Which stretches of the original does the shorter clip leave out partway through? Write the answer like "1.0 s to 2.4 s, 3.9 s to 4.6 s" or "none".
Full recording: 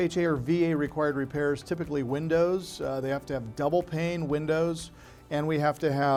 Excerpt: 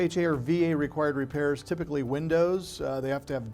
none